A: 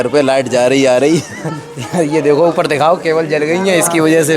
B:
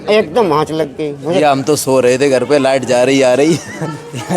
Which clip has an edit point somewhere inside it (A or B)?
B